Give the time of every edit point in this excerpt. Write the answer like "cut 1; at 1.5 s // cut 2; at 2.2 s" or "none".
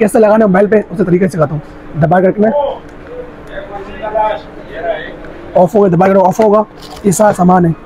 none